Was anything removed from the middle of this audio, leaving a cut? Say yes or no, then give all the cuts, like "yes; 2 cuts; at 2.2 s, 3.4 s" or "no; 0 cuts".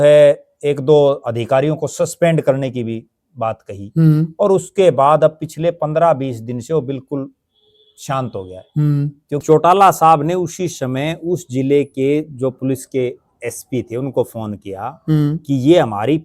yes; 1 cut; at 9.4 s